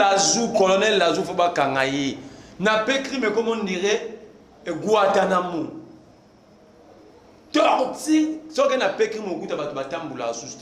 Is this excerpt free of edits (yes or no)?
yes